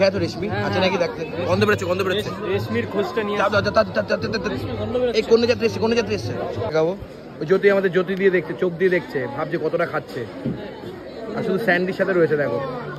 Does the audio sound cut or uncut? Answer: cut